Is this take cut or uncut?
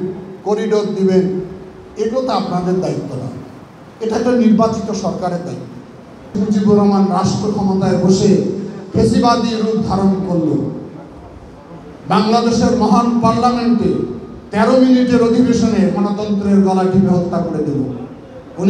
cut